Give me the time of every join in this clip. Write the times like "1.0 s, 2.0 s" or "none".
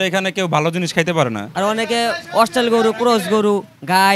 1.9 s